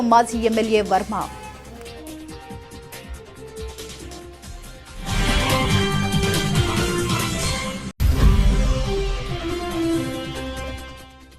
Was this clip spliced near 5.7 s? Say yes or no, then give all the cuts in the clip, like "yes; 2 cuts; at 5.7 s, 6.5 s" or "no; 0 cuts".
yes; 4 cuts; at 2.9 s, 5.7 s, 7.9 s, 10.6 s